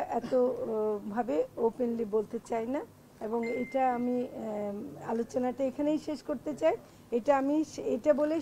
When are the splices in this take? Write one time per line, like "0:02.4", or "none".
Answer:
none